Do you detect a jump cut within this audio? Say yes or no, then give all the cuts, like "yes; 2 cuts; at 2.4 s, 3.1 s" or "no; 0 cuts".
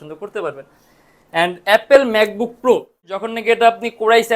yes; 1 cut; at 3.3 s